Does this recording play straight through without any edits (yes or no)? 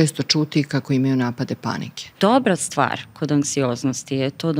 no